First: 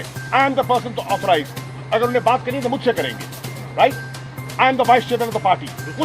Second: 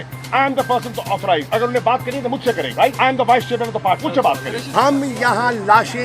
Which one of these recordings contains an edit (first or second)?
second